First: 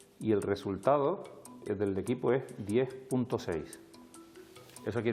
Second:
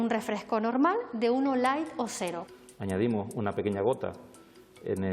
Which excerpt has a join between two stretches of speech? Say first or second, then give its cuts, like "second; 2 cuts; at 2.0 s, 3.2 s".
second; 1 cut; at 2.4 s